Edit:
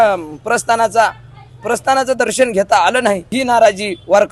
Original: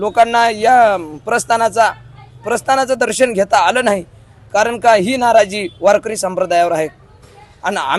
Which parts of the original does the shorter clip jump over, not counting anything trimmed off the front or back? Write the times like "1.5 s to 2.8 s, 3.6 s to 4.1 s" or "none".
4.2 s to 5.1 s